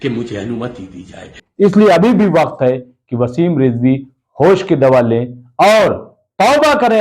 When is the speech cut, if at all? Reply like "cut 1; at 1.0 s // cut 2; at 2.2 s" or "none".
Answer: cut 1; at 1.4 s